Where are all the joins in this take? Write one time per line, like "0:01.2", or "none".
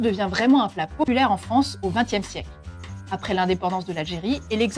0:01.1